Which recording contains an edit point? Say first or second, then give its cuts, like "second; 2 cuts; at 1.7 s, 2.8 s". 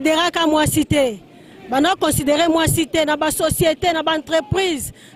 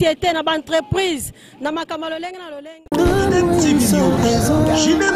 second; 1 cut; at 2.8 s